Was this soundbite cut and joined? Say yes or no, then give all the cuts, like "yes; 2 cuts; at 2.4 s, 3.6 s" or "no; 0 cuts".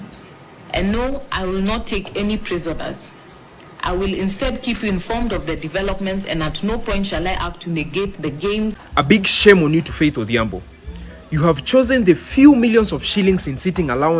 yes; 1 cut; at 8.8 s